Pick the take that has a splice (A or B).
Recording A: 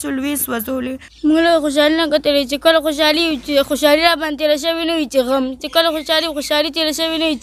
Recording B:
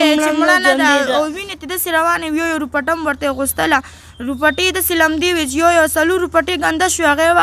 A